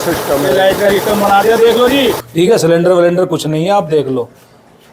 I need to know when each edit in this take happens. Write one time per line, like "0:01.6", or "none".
0:02.2